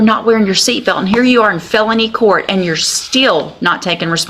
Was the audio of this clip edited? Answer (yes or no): no